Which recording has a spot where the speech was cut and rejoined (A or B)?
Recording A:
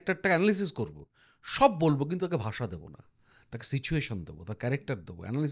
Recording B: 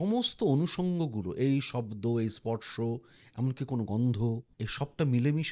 B